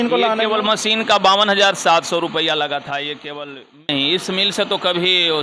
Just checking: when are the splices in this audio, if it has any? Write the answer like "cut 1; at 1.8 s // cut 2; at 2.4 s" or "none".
cut 1; at 3.8 s